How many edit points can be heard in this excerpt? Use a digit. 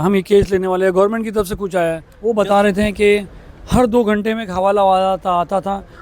1